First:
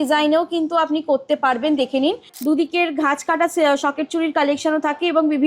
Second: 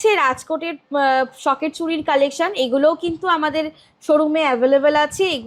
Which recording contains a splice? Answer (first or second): first